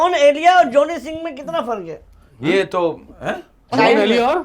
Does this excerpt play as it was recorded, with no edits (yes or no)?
yes